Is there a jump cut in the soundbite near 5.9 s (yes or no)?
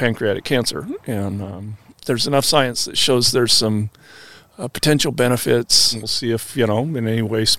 yes